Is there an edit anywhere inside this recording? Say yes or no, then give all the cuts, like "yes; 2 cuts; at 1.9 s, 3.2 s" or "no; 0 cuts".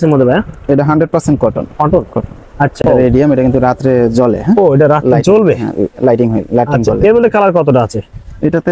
yes; 1 cut; at 2.7 s